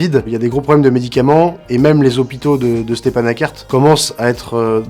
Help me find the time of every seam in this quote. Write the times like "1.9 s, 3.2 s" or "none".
none